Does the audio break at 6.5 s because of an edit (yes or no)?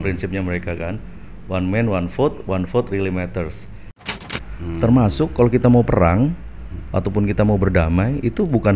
no